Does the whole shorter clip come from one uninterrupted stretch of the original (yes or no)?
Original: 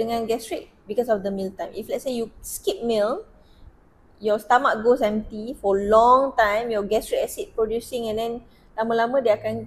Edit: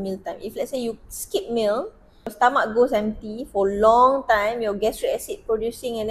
no